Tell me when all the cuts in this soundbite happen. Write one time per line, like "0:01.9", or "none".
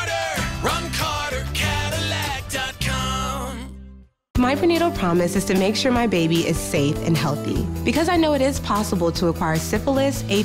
none